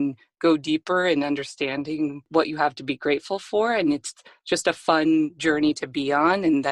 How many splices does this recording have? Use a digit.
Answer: 1